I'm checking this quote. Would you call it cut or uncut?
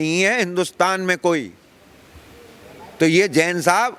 uncut